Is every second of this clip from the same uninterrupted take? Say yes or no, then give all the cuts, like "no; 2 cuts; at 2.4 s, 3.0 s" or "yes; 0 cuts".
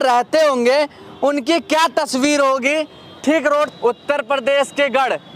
no; 1 cut; at 3.7 s